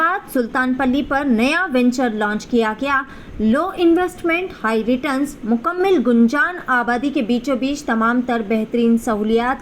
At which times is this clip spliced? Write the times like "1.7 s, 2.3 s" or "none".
none